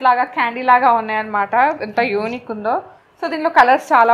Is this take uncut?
yes; 0 cuts

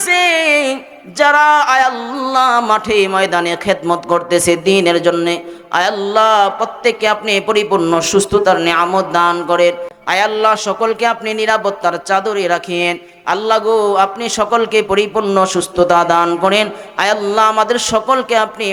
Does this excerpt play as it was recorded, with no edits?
yes; 0 cuts

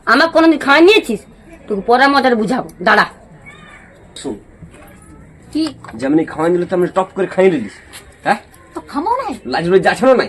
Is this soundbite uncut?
no; 1 cut; at 4.1 s

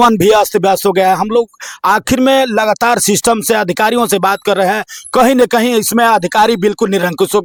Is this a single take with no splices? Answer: yes; 0 cuts

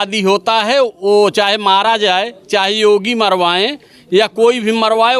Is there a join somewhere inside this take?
no; 0 cuts

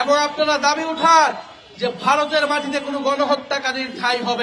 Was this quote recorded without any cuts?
yes; 0 cuts

